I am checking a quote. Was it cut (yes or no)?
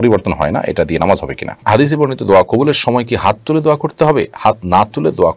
yes